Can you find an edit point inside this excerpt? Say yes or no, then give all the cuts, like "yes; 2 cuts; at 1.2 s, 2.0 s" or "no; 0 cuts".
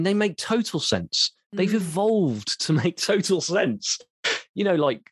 no; 0 cuts